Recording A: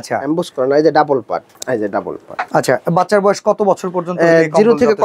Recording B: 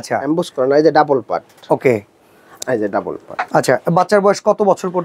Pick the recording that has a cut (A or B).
A